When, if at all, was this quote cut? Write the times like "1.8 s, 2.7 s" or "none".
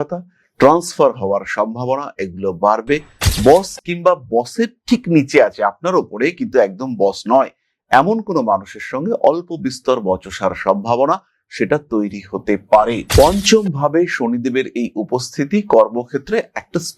none